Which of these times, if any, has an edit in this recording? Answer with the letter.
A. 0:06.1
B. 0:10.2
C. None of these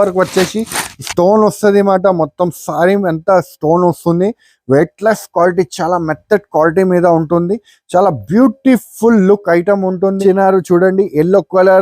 B